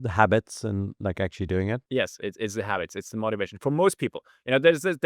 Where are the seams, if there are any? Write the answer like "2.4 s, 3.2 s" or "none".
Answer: 1.8 s